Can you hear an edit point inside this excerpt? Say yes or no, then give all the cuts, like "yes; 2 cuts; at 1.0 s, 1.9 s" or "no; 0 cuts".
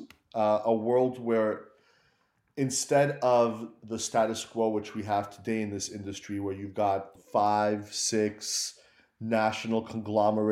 yes; 1 cut; at 7.2 s